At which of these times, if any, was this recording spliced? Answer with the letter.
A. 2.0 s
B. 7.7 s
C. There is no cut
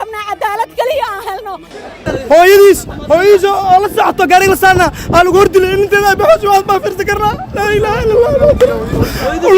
A